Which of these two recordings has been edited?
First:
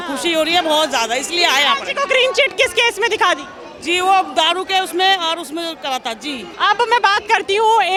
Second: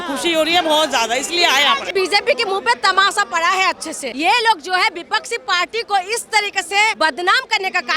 second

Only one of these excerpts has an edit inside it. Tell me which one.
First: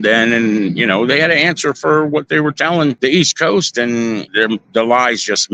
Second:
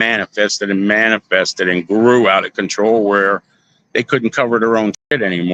first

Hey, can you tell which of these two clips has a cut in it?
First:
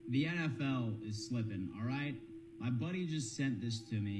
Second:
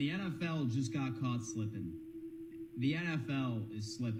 first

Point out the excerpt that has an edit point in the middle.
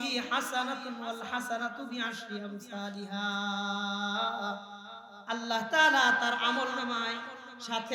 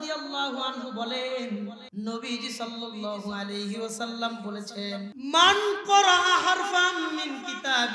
second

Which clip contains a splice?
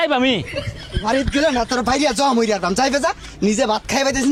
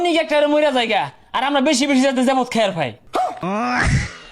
second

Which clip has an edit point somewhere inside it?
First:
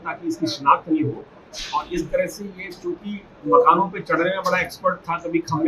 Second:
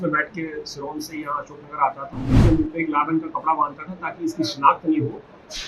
second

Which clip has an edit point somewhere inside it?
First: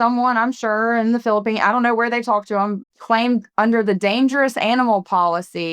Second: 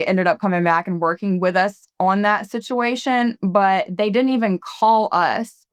first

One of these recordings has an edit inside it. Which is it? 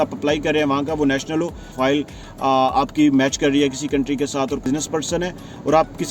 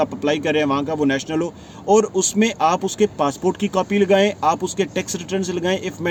first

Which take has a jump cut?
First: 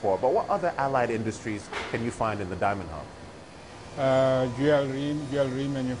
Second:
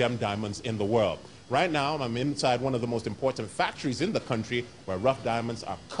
first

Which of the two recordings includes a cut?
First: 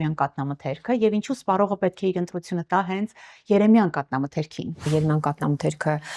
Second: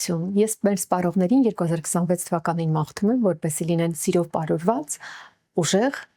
first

